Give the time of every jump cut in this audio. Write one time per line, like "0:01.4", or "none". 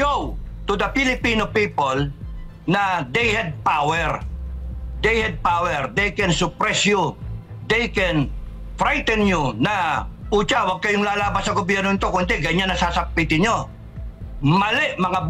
none